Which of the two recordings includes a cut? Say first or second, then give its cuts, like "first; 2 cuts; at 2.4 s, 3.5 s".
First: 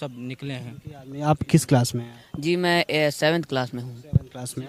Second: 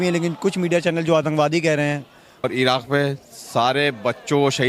second; 1 cut; at 2.5 s